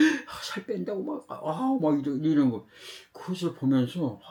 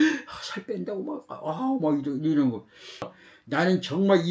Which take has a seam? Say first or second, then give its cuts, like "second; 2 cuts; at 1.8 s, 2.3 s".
second; 1 cut; at 3.2 s